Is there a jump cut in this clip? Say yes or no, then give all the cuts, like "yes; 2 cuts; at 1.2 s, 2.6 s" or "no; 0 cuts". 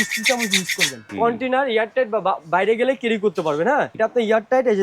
yes; 2 cuts; at 1.0 s, 3.9 s